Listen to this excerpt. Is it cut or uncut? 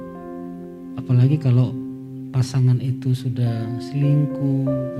uncut